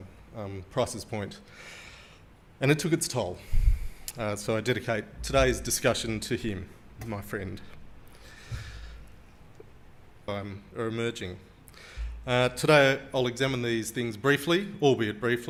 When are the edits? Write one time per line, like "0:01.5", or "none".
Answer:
none